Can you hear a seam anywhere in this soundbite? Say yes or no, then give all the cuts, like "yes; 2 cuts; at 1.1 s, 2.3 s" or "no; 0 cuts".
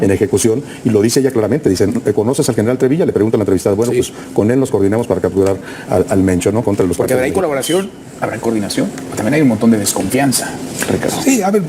yes; 1 cut; at 6.6 s